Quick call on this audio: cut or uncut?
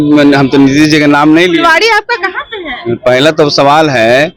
uncut